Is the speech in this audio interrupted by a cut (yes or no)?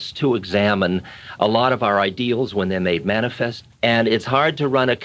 yes